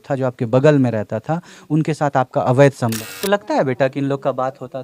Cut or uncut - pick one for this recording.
cut